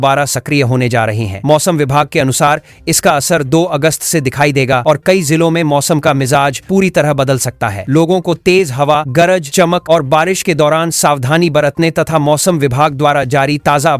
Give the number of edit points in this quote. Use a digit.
0